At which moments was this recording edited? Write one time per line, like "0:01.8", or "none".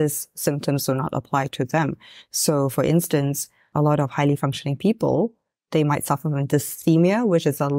0:03.6